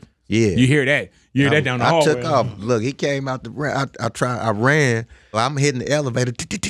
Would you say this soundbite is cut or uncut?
cut